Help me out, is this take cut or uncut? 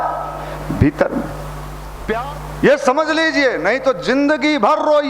cut